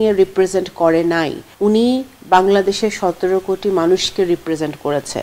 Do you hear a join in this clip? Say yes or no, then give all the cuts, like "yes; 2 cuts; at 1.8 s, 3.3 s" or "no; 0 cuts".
yes; 1 cut; at 1.4 s